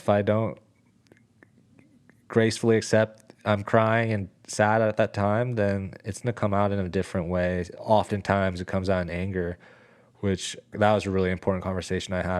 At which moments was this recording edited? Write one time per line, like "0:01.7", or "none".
0:07.7
0:10.7